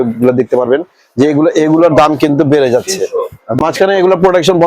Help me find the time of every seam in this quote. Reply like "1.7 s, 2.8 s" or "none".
3.6 s